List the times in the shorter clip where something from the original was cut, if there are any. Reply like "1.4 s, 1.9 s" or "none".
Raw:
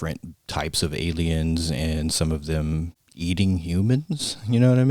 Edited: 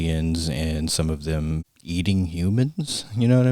1.7 s